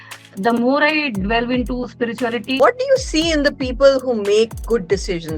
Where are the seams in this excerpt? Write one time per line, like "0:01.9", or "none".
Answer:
0:02.6